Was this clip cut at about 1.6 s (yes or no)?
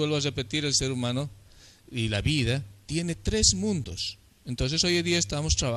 no